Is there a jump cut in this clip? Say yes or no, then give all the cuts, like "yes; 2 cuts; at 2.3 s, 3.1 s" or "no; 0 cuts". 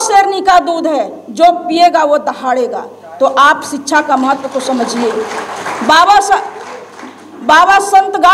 no; 0 cuts